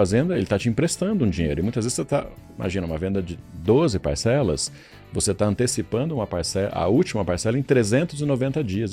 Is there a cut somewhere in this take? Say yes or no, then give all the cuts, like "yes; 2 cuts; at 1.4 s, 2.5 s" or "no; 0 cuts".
no; 0 cuts